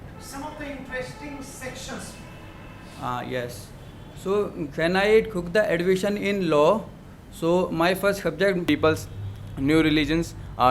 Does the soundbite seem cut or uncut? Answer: cut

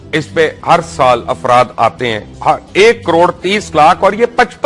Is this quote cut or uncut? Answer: uncut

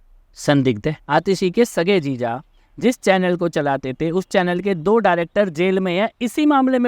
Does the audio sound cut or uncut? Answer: cut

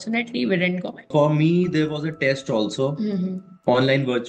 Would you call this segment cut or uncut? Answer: cut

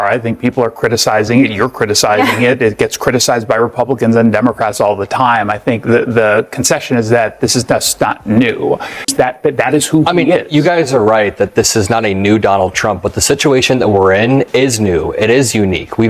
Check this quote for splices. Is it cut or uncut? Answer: cut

